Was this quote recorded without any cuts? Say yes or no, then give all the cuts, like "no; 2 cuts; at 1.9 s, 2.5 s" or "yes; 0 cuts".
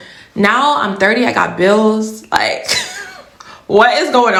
yes; 0 cuts